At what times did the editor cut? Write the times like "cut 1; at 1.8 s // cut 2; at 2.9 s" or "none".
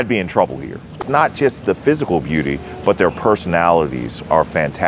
cut 1; at 1.0 s